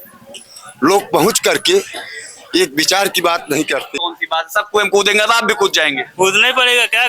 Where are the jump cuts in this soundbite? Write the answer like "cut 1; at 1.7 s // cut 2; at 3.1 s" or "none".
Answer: cut 1; at 3.9 s